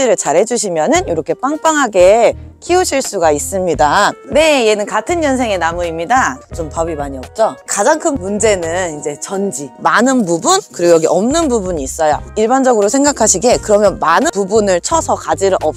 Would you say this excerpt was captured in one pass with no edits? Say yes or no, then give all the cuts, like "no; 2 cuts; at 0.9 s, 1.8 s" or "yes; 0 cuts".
no; 3 cuts; at 4.2 s, 6.4 s, 9.7 s